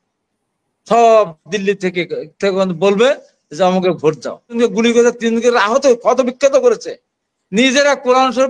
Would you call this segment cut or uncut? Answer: cut